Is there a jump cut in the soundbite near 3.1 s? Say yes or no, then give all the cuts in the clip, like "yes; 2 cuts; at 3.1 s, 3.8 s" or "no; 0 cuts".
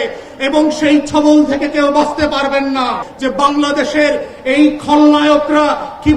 yes; 1 cut; at 3.1 s